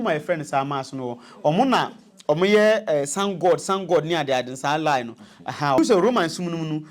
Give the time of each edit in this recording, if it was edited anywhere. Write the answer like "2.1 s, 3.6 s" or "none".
5.8 s